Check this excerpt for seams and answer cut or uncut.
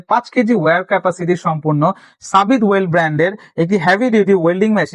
uncut